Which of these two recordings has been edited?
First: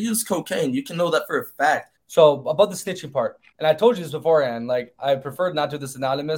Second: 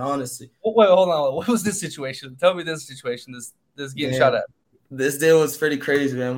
first; 1 cut; at 2.0 s

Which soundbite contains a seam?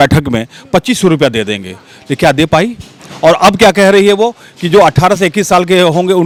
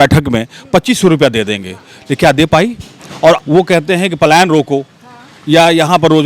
second; 1 cut; at 3.4 s

